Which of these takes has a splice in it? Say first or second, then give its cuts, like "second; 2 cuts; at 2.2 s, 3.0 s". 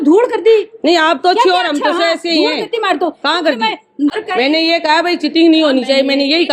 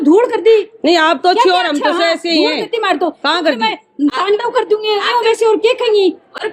first; 1 cut; at 4.1 s